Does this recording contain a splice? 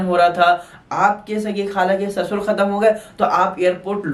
no; 0 cuts

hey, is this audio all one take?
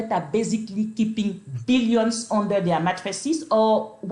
yes; 0 cuts

